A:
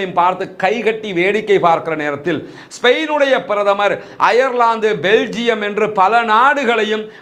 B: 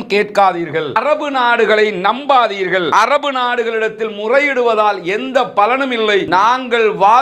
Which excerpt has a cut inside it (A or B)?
B